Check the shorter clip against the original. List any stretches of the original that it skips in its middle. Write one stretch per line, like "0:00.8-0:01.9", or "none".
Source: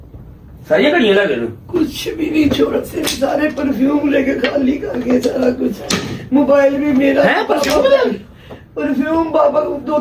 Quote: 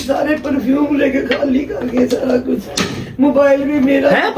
none